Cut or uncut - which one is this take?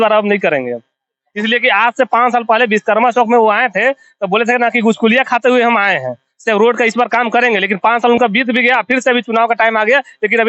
uncut